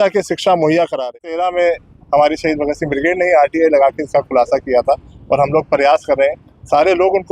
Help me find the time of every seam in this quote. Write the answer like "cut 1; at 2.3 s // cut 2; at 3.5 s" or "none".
cut 1; at 1.3 s